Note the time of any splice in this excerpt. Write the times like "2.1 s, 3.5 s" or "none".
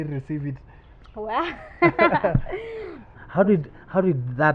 3.0 s